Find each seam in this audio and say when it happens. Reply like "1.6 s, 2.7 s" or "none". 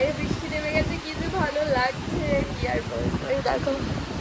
none